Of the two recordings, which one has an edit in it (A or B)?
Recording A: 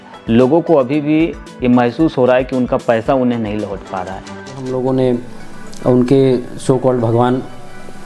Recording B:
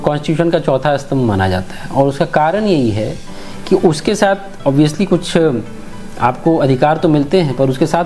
A